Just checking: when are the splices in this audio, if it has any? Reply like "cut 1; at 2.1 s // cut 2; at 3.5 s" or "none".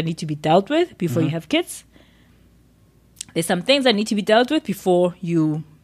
none